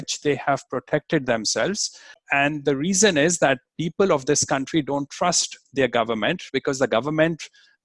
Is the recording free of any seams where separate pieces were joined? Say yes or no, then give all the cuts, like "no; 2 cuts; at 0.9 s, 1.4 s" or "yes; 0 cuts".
no; 1 cut; at 2.2 s